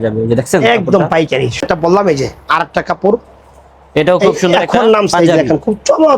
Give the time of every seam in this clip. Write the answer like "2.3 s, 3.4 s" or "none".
1.6 s

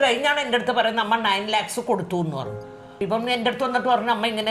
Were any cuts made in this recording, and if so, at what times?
2.9 s

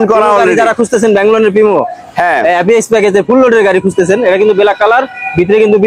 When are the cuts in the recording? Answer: none

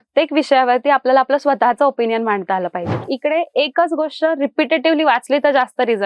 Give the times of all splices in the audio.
3.1 s

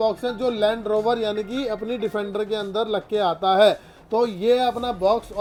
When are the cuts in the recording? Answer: none

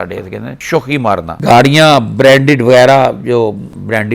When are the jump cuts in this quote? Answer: 1.3 s

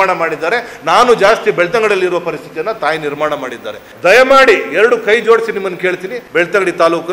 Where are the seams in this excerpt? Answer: 3.9 s, 6.2 s

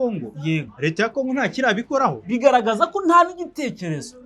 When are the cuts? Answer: 2.2 s

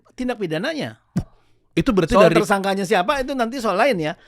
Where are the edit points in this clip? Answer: none

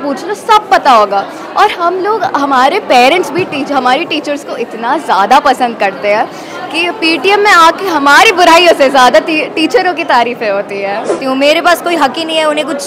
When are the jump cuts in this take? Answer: 11.2 s

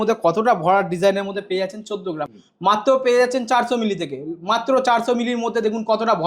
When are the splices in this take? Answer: 2.2 s

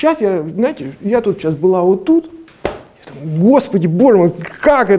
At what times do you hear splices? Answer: none

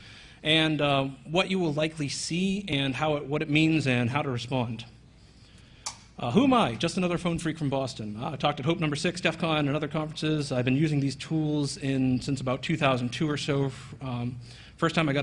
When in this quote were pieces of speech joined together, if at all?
9.8 s

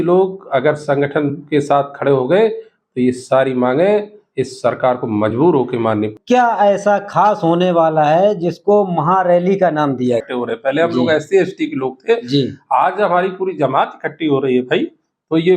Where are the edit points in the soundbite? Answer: 6.1 s, 10.2 s

